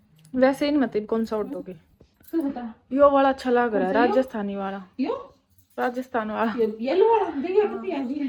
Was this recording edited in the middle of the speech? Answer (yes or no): no